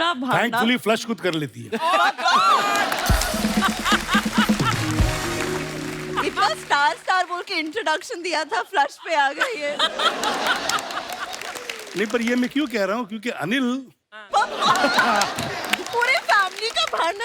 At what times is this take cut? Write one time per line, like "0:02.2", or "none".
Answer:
none